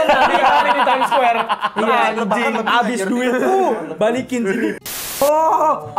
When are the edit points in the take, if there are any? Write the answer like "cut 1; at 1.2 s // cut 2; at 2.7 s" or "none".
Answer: cut 1; at 4.7 s